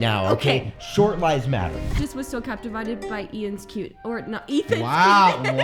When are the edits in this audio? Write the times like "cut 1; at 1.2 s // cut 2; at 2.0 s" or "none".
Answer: cut 1; at 2.0 s